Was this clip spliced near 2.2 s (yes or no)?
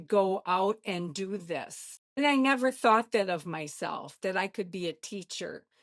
yes